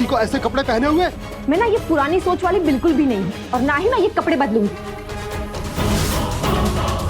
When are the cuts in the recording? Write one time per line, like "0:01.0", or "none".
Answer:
none